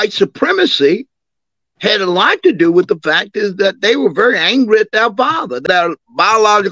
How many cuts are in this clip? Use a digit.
1